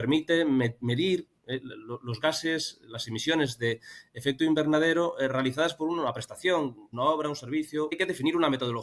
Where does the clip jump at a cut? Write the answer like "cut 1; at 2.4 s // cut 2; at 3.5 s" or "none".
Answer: cut 1; at 6.9 s // cut 2; at 7.9 s